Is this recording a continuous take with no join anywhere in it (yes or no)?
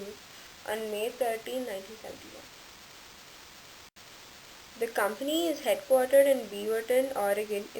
no